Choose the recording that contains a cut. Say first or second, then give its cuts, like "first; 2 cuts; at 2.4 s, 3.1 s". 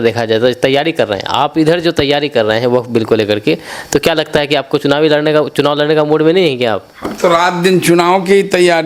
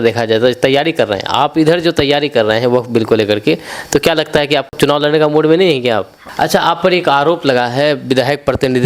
second; 2 cuts; at 4.7 s, 6.2 s